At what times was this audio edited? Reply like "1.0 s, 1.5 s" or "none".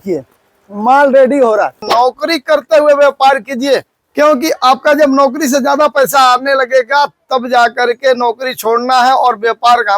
1.9 s, 4.0 s